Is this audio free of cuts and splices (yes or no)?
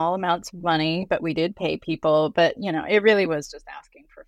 yes